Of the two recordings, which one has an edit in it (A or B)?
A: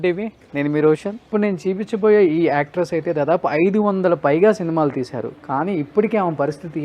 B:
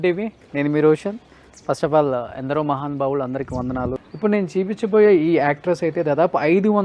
A